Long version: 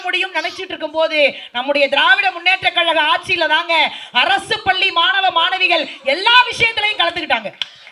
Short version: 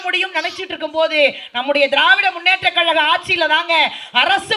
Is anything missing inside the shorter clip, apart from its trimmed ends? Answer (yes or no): no